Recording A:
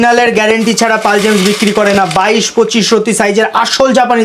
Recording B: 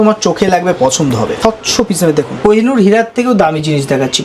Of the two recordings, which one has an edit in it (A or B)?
B